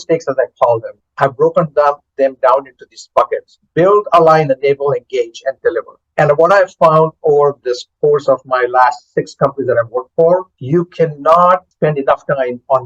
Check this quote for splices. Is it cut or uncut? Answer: cut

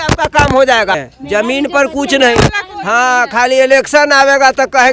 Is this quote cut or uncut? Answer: cut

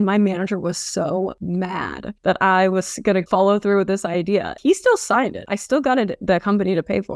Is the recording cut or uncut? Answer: cut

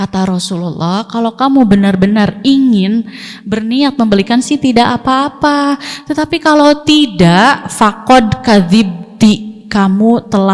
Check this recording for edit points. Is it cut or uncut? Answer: uncut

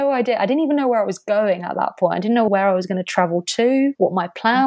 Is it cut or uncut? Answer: cut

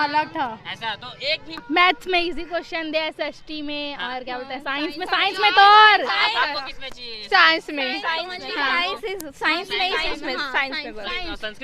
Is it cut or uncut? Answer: cut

